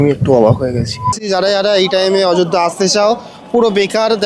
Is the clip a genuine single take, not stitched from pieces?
no; 1 cut; at 1.4 s

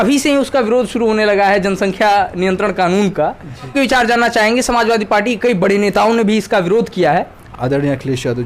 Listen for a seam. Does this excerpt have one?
yes; 2 cuts; at 3.7 s, 7.4 s

